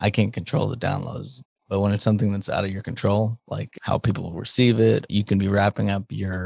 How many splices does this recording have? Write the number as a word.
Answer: two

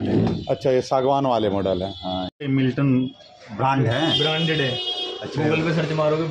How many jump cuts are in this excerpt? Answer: one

